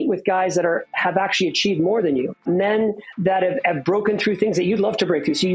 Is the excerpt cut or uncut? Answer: cut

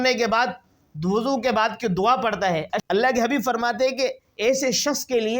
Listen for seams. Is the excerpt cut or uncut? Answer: cut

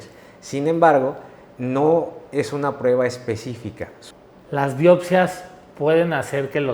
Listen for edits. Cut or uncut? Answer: cut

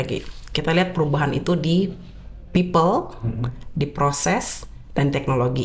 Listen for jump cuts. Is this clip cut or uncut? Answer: uncut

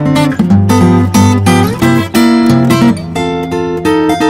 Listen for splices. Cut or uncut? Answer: uncut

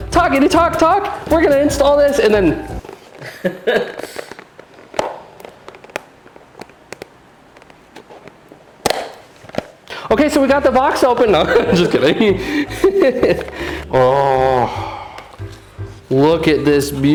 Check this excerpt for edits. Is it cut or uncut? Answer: uncut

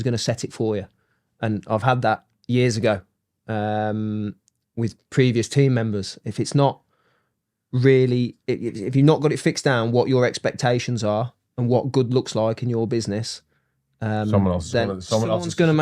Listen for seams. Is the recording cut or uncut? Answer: uncut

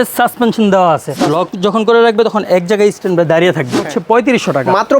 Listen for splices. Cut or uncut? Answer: cut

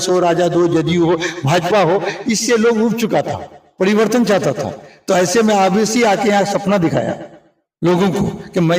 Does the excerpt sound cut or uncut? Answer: uncut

